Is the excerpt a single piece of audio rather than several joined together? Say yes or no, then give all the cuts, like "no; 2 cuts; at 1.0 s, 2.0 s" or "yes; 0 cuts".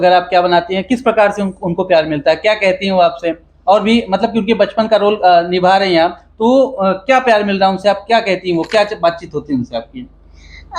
yes; 0 cuts